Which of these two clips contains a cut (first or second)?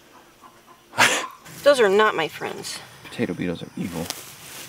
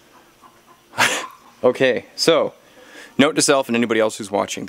first